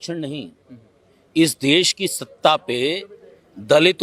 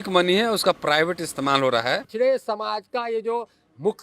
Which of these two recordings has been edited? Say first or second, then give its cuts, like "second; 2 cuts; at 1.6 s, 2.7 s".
second; 1 cut; at 2.1 s